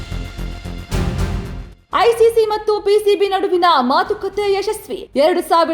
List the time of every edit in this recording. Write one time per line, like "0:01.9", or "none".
0:01.7